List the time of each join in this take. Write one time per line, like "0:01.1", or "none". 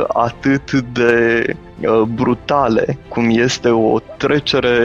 0:01.6
0:03.0